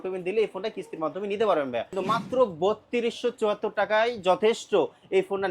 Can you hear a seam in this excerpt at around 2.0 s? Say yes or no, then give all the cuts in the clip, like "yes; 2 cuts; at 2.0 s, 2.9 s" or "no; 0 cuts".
yes; 1 cut; at 2.0 s